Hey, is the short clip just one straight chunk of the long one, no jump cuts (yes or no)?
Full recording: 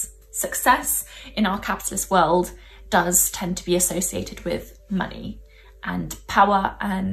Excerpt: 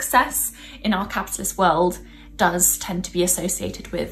yes